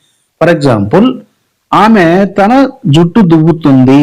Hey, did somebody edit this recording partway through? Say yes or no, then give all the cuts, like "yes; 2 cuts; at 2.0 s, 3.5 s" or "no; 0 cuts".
no; 0 cuts